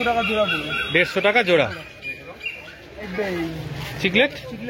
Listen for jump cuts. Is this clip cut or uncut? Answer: uncut